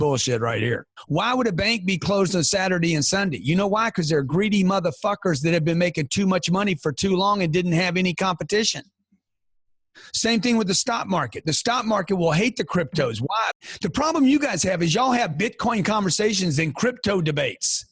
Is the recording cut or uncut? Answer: cut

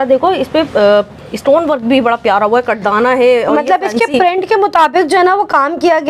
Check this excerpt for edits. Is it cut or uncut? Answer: uncut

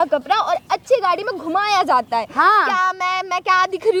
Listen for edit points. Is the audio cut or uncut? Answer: uncut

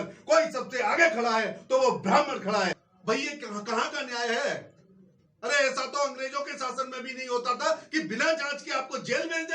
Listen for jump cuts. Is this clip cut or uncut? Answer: cut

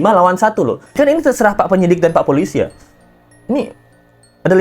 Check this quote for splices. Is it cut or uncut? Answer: cut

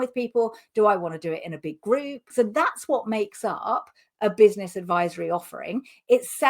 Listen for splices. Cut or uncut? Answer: cut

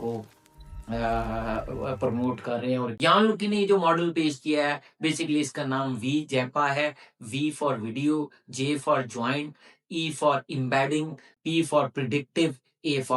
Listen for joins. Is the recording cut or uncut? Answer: cut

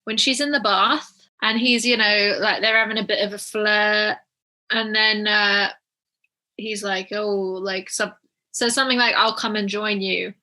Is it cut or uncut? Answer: cut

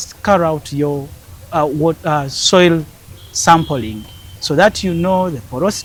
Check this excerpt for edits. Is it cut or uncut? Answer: uncut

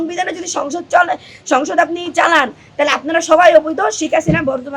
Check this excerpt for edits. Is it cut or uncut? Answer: uncut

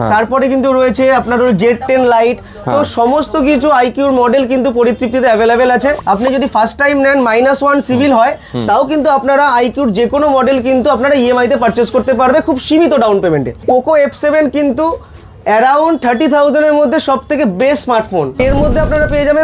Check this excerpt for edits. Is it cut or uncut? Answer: cut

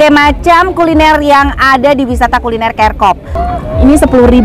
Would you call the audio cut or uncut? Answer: cut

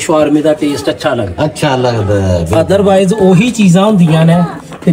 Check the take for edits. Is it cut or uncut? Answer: uncut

